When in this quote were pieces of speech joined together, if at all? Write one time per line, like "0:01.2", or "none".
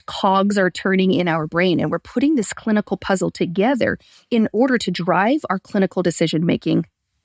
0:04.1